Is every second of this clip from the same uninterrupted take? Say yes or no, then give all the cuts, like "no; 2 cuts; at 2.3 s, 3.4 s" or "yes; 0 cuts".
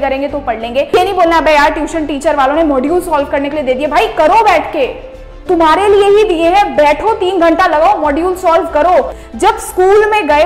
no; 2 cuts; at 0.9 s, 9.2 s